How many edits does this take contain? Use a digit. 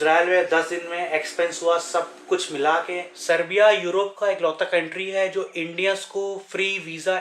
1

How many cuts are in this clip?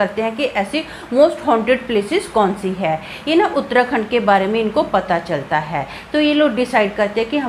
0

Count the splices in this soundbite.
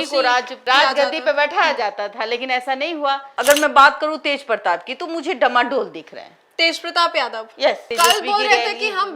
2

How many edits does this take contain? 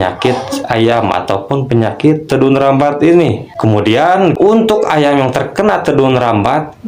1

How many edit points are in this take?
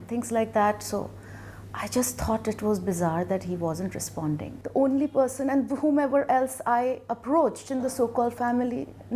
1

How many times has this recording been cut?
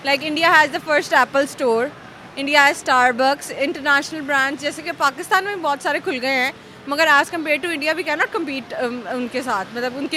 0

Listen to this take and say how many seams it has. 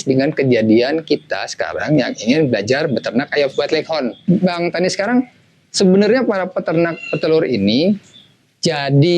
1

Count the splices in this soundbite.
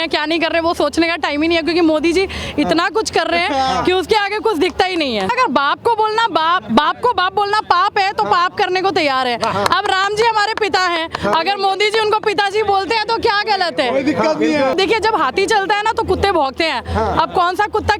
2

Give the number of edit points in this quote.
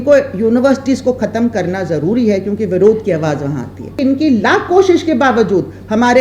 1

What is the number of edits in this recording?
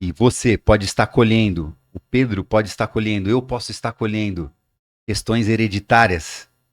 0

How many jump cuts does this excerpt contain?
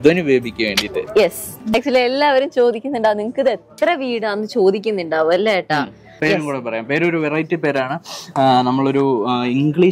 2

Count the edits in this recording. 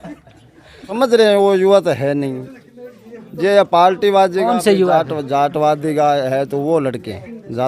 1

